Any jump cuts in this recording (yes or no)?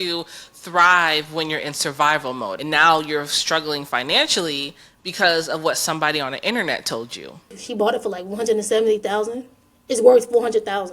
yes